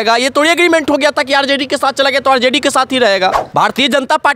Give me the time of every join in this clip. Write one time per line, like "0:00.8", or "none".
0:03.4